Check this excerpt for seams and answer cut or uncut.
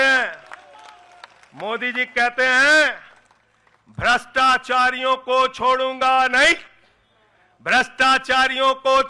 uncut